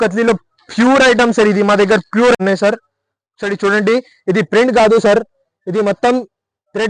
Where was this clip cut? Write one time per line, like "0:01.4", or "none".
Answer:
0:02.4